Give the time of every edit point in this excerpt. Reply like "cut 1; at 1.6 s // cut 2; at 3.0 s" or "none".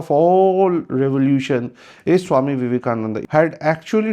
cut 1; at 3.2 s